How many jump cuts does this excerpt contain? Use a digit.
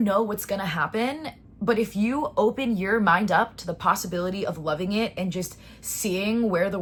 0